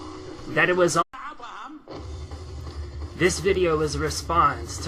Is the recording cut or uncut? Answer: uncut